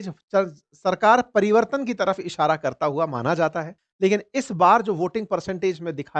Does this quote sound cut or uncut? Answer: cut